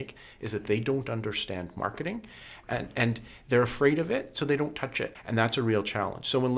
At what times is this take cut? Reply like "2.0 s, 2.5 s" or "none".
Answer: 5.1 s